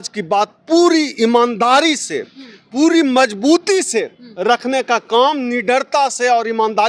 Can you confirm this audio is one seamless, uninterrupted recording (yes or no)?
yes